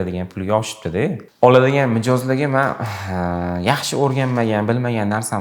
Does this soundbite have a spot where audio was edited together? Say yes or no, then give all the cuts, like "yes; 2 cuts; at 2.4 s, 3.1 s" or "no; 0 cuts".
yes; 1 cut; at 1.2 s